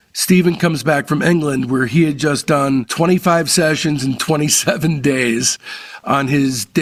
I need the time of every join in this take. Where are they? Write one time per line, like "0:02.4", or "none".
none

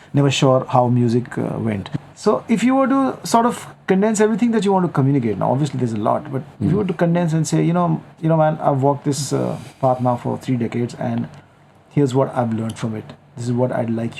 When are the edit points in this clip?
0:01.9

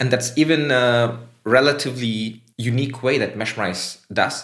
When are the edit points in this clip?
0:02.5

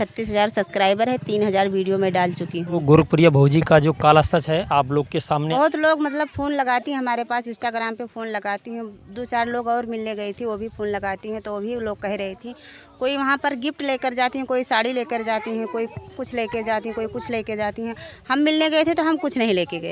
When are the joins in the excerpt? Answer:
0:02.8
0:05.5

